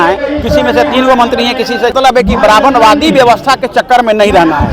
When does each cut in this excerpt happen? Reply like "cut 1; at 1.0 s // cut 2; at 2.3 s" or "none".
cut 1; at 1.9 s